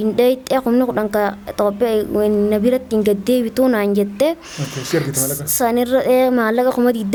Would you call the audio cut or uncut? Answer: uncut